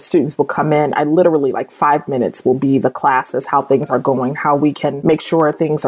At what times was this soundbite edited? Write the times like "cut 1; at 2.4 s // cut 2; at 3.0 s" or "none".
cut 1; at 4.8 s